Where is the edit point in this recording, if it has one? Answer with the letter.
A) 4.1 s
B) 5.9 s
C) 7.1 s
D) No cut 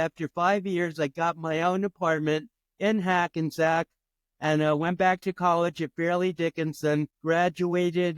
C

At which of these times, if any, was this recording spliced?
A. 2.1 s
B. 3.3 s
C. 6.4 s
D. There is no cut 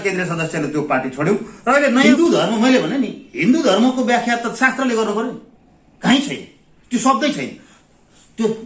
A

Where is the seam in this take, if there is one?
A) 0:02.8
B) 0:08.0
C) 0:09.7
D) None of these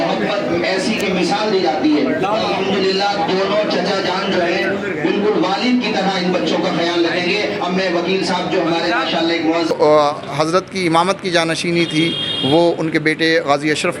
C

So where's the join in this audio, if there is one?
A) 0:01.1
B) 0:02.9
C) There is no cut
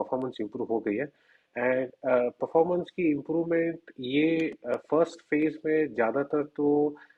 C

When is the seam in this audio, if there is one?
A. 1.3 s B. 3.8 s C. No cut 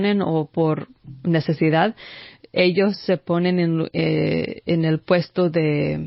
C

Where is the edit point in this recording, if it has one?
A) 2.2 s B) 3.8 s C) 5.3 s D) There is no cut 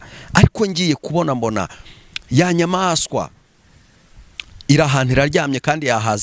D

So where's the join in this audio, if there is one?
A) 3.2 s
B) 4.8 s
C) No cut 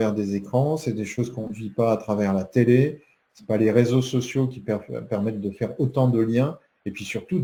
C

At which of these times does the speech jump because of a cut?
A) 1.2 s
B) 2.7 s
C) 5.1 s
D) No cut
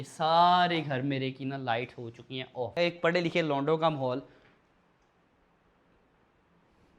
B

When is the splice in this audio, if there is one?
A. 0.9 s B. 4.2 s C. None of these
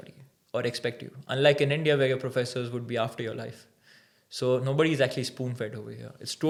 C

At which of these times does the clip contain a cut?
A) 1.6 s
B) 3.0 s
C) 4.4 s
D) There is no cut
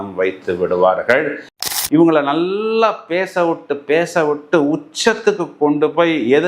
A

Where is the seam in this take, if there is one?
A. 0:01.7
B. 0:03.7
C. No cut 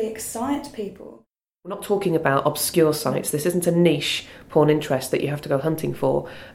A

